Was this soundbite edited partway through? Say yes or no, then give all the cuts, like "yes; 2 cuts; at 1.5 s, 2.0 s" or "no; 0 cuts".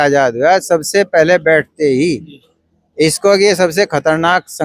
no; 0 cuts